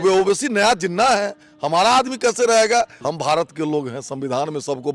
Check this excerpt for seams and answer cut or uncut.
cut